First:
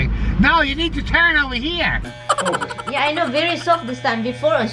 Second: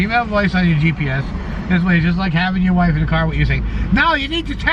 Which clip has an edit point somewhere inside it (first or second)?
first